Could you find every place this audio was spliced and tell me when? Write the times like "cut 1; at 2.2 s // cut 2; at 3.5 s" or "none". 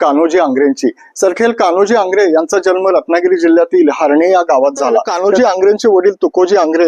cut 1; at 5.1 s